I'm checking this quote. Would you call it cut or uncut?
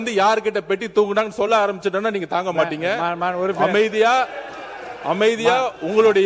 uncut